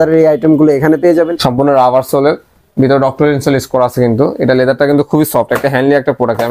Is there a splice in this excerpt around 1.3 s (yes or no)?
yes